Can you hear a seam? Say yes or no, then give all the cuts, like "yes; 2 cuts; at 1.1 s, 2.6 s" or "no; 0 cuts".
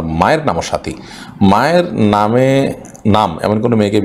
no; 0 cuts